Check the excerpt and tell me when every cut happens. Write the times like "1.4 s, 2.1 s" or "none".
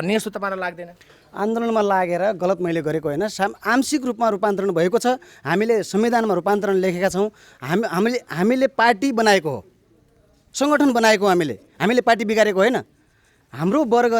none